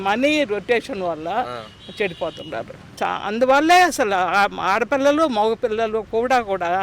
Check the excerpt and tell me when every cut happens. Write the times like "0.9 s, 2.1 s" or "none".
2.8 s